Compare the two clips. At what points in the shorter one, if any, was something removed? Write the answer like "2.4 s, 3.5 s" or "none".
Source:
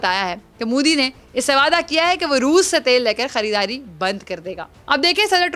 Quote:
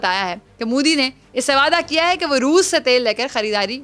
none